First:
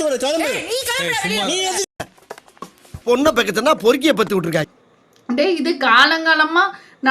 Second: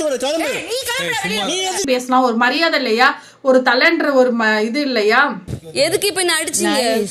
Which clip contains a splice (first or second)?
second